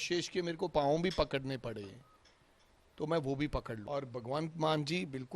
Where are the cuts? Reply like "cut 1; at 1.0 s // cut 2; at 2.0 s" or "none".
cut 1; at 3.8 s